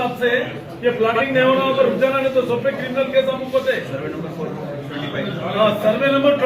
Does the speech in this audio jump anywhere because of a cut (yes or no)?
no